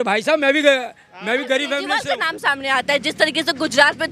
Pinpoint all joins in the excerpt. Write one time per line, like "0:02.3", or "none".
0:01.9